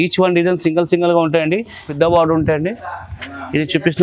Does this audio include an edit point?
yes; 1 cut; at 1.8 s

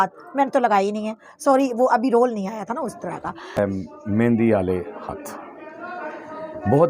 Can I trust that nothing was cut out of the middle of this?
no; 1 cut; at 3.6 s

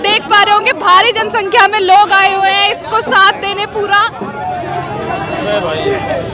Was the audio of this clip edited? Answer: no; 0 cuts

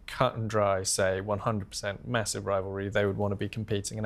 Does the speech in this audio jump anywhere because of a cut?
no; 0 cuts

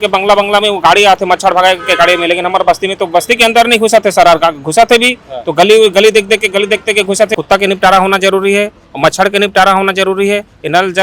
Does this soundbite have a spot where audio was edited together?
yes; 1 cut; at 7.4 s

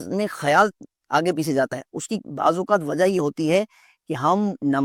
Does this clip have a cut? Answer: no; 0 cuts

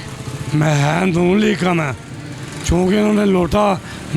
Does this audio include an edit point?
no; 0 cuts

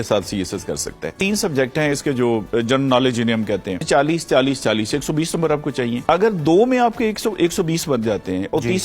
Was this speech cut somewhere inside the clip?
yes; 3 cuts; at 1.1 s, 3.8 s, 6.0 s

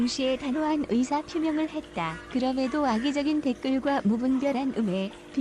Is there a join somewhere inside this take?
yes; 1 cut; at 1.9 s

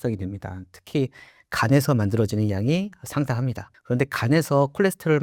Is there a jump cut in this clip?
no; 0 cuts

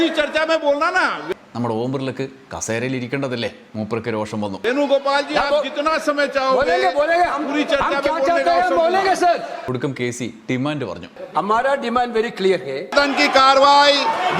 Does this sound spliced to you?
yes; 4 cuts; at 1.2 s, 4.6 s, 9.6 s, 12.9 s

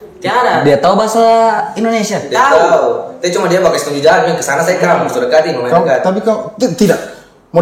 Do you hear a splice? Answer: no; 0 cuts

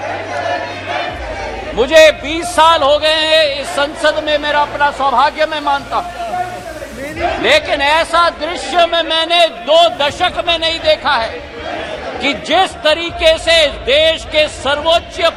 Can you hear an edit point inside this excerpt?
no; 0 cuts

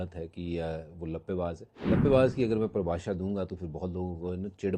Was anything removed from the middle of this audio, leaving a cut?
yes; 1 cut; at 1.7 s

